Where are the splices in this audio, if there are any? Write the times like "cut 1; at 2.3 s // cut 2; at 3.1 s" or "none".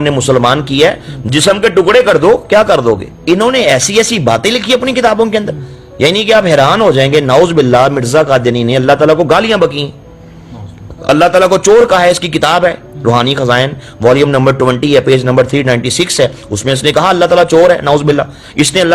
cut 1; at 3.1 s